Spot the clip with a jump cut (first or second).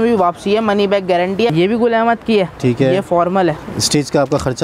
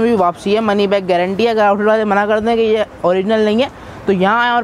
first